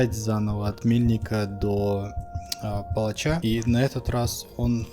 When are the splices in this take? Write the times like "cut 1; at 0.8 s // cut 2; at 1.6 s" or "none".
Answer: cut 1; at 3.4 s